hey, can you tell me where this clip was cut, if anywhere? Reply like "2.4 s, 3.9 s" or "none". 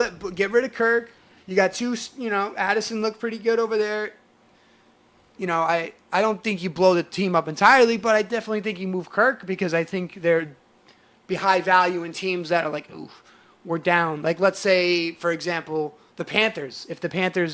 none